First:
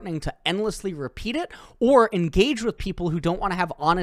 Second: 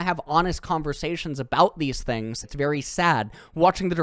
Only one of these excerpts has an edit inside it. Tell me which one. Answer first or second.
second